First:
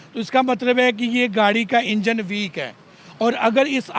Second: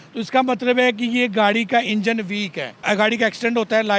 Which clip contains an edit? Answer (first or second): second